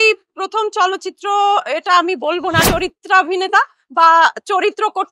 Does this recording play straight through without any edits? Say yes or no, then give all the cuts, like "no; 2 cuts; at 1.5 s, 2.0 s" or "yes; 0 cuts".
no; 1 cut; at 2.7 s